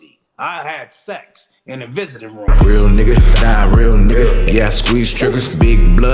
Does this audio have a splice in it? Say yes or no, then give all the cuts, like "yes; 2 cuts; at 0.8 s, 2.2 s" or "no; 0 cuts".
yes; 1 cut; at 2.5 s